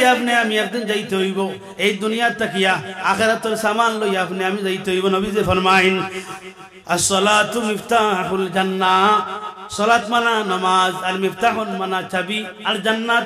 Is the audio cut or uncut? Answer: uncut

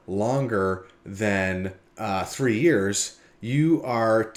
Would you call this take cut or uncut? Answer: uncut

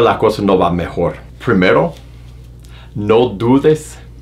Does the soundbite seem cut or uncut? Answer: uncut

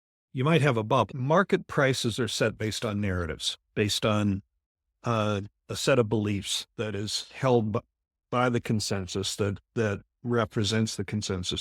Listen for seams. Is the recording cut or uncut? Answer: cut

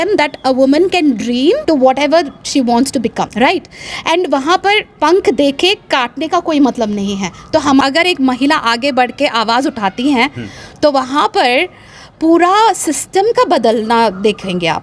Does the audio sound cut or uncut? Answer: cut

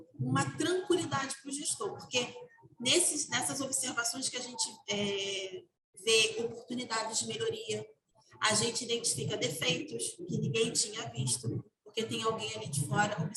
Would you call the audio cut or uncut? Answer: uncut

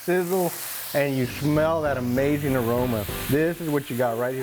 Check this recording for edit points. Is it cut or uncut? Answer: uncut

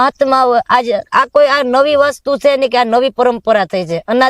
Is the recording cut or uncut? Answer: uncut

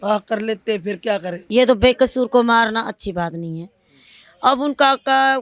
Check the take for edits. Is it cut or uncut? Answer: cut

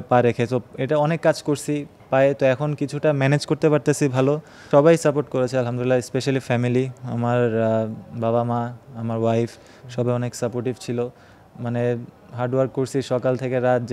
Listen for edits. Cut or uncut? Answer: cut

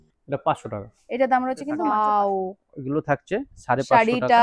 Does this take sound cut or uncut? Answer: cut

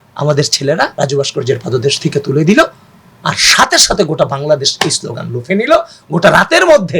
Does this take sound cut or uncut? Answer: cut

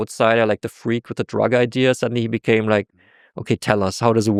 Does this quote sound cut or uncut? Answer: uncut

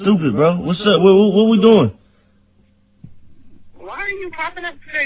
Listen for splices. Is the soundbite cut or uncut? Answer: uncut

